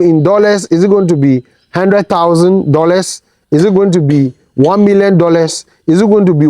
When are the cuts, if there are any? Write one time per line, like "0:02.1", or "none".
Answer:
none